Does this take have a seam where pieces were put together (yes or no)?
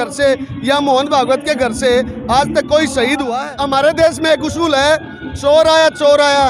yes